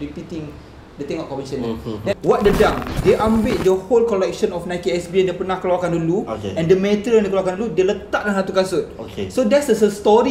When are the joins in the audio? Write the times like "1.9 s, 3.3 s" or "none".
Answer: 2.1 s